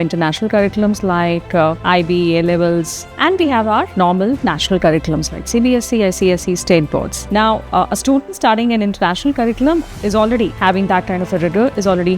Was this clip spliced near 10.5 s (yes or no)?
yes